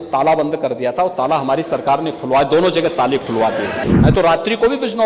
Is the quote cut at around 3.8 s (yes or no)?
yes